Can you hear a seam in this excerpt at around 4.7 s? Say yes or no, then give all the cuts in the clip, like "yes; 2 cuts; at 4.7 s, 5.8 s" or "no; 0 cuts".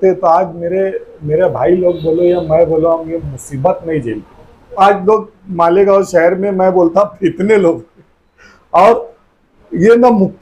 yes; 1 cut; at 4.7 s